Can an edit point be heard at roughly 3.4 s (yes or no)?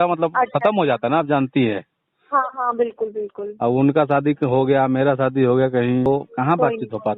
no